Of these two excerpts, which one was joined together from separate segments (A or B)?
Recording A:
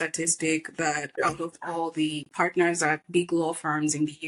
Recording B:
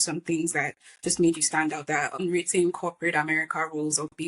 B